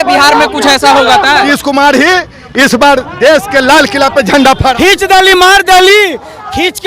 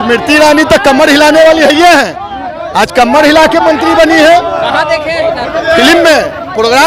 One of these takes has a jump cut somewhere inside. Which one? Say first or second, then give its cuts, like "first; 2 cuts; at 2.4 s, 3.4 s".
first; 2 cuts; at 1.4 s, 4.7 s